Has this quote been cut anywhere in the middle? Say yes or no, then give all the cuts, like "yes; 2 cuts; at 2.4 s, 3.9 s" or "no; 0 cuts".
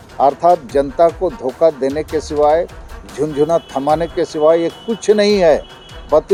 no; 0 cuts